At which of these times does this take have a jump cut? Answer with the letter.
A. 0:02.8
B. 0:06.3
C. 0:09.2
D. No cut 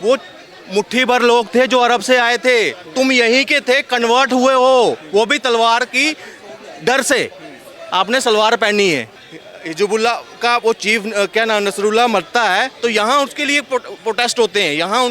C